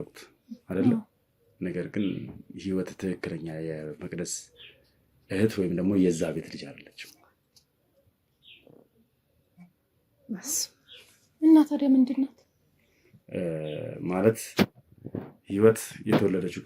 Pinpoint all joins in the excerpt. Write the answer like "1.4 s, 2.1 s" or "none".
none